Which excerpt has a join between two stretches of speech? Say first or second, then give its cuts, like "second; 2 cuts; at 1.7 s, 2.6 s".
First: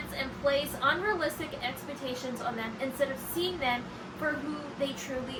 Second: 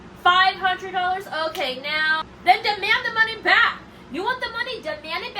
second; 1 cut; at 2.2 s